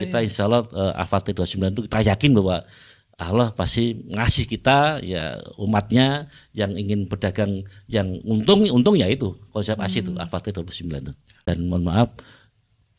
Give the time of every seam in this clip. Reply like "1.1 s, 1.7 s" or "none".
11.4 s